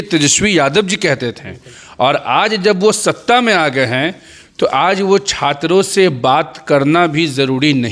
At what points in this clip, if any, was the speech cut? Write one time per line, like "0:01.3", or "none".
none